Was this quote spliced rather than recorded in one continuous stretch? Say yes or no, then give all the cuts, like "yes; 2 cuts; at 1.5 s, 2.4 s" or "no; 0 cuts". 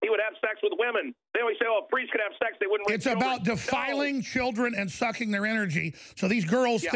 no; 0 cuts